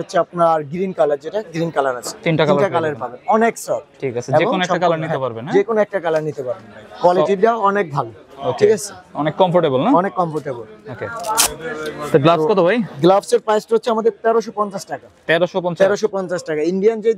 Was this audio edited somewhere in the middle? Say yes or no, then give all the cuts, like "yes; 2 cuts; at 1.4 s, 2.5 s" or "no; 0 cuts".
no; 0 cuts